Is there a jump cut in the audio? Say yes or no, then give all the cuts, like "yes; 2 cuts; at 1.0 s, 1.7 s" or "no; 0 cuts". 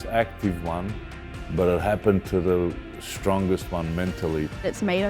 no; 0 cuts